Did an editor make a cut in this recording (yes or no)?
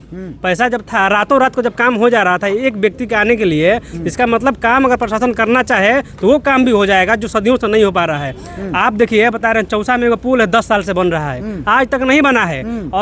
no